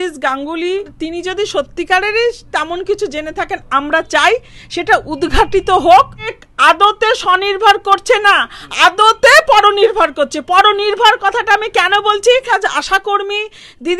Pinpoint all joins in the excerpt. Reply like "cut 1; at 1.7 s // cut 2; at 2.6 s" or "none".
cut 1; at 1.0 s // cut 2; at 6.3 s // cut 3; at 12.5 s